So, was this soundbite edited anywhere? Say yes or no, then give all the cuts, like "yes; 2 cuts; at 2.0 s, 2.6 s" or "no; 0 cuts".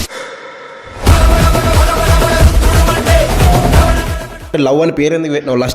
yes; 1 cut; at 4.5 s